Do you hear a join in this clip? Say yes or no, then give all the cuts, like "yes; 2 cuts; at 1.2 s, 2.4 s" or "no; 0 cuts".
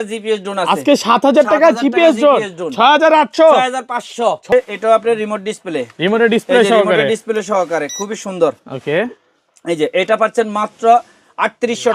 yes; 1 cut; at 4.5 s